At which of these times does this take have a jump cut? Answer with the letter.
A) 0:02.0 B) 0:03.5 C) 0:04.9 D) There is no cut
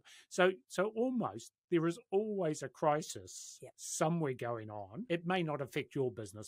C